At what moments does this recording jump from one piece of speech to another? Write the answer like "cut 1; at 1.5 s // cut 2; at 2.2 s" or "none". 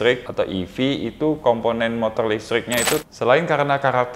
cut 1; at 3.0 s